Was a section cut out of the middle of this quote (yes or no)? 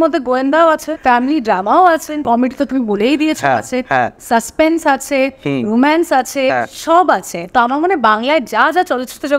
yes